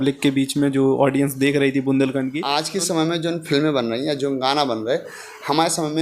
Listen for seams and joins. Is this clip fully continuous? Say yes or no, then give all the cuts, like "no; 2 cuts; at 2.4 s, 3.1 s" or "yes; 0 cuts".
no; 1 cut; at 2.7 s